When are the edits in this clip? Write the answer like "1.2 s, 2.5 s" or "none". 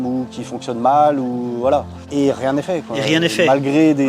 none